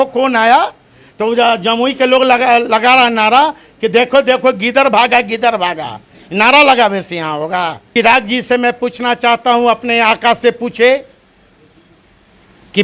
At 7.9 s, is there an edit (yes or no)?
yes